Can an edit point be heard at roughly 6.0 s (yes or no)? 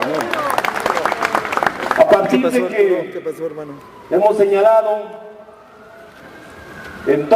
no